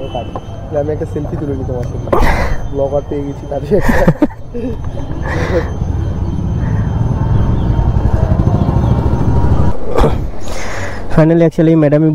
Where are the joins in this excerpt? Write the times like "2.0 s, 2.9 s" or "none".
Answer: 9.7 s